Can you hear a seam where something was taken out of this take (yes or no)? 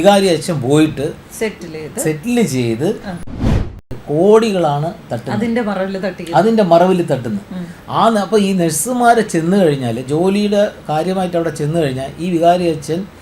yes